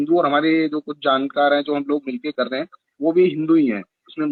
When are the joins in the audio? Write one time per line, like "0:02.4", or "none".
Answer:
none